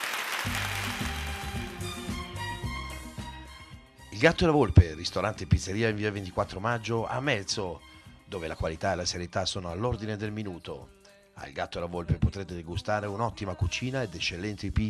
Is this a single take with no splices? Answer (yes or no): no